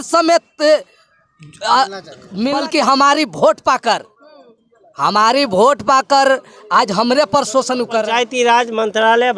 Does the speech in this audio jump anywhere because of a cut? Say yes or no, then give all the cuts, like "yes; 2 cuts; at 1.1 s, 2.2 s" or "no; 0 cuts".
yes; 2 cuts; at 2.5 s, 8.0 s